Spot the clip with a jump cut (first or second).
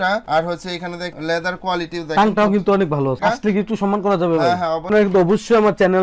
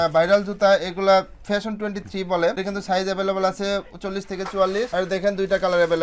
first